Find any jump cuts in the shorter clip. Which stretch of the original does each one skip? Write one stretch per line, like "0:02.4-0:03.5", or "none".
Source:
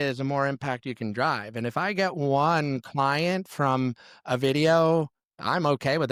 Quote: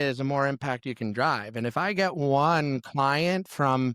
none